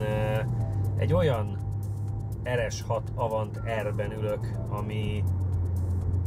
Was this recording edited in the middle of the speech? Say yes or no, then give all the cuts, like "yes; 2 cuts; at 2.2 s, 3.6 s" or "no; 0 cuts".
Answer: no; 0 cuts